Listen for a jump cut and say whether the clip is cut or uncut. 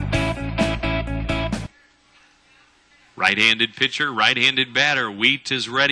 cut